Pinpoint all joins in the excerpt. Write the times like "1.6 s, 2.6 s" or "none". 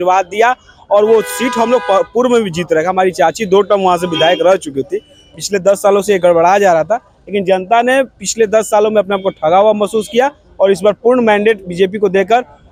none